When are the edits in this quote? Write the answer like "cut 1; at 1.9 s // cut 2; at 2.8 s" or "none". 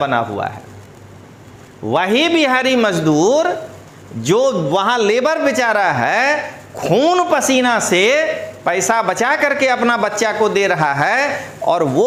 none